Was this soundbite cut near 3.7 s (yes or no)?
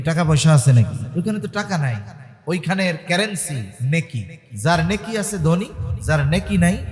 yes